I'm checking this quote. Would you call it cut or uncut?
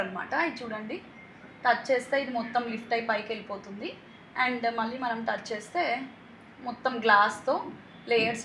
uncut